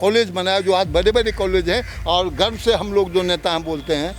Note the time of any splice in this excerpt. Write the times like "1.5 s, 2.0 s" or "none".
none